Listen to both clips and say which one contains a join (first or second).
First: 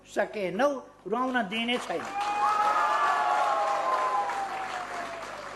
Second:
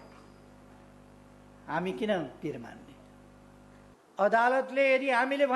second